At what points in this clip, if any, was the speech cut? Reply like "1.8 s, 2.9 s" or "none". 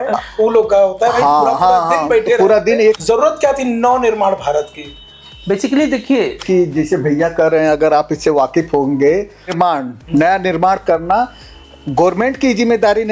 3.0 s, 6.4 s, 9.5 s